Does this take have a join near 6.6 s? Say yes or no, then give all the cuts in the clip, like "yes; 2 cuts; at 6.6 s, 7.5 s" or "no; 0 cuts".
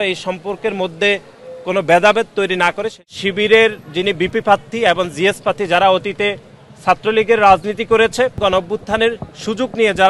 no; 2 cuts; at 3.1 s, 8.4 s